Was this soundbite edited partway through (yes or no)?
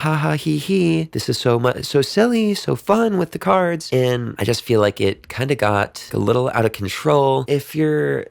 yes